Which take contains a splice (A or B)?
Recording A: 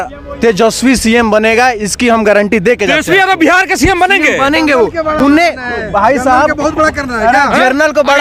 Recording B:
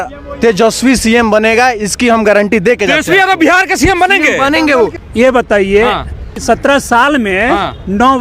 B